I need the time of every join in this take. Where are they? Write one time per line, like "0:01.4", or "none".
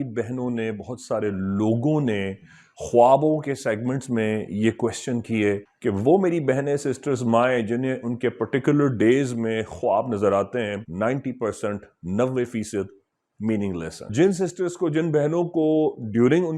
0:05.7
0:10.8
0:14.1